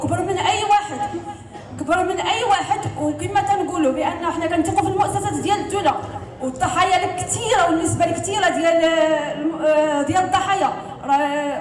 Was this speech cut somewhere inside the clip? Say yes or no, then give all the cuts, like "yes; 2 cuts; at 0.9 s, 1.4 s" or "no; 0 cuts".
no; 0 cuts